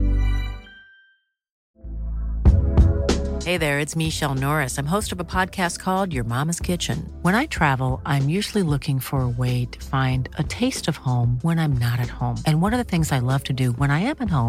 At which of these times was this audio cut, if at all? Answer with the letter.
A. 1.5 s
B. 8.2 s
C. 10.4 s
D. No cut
A